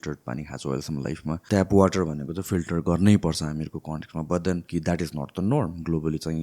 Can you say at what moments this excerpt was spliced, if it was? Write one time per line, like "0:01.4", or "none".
0:01.4
0:04.6

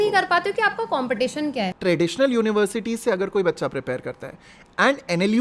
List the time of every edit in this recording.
0:01.7

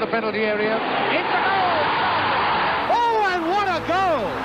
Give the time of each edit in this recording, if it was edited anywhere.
0:00.8
0:02.9

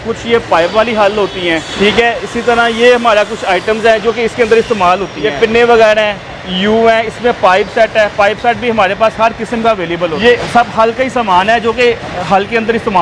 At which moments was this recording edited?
0:01.7
0:05.3
0:10.2

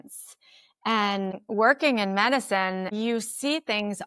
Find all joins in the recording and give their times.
0:01.4
0:02.9

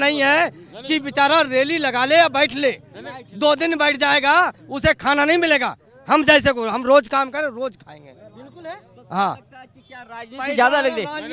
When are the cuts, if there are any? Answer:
none

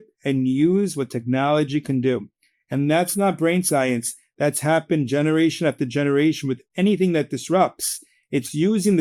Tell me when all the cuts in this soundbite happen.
none

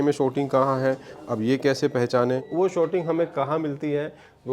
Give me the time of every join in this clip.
0:02.5

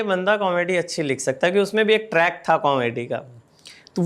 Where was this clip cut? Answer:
none

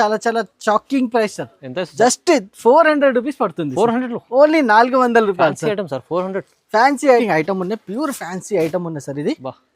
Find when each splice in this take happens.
0:07.2

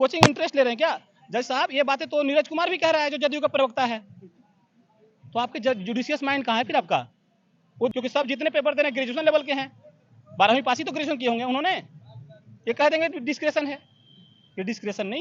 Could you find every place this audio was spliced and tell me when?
0:07.9

